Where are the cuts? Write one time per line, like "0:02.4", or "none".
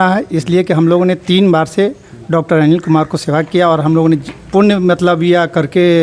none